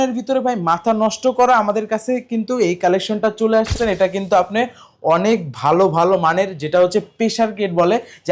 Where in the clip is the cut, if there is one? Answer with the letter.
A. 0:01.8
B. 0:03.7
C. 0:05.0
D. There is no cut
B